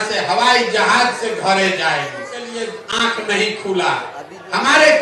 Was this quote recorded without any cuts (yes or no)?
no